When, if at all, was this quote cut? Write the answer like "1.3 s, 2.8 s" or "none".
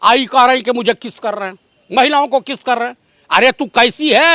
none